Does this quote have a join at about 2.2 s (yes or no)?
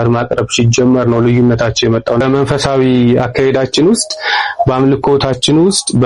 yes